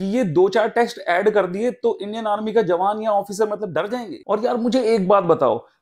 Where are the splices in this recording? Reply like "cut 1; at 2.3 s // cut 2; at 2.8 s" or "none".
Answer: cut 1; at 4.1 s